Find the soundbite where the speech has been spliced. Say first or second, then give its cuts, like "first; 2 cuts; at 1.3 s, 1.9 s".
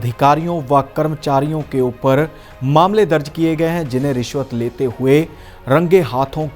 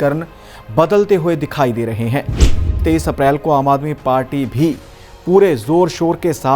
second; 1 cut; at 2.6 s